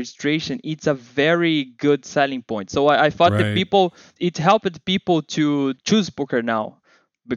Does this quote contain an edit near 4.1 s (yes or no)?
yes